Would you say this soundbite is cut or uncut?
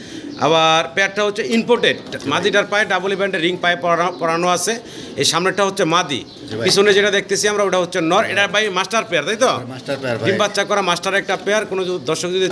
uncut